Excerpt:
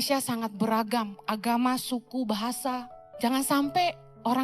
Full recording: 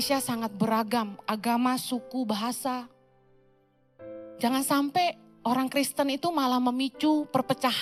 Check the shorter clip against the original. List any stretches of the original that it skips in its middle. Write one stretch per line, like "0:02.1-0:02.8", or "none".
0:03.0-0:04.2